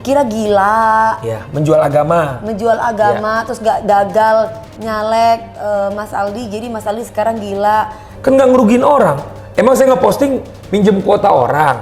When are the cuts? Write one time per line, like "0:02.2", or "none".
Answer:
0:08.0